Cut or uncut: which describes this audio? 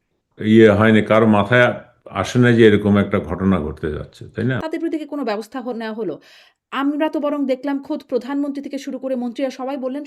cut